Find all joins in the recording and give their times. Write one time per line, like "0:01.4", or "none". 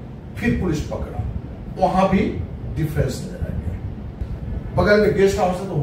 0:04.3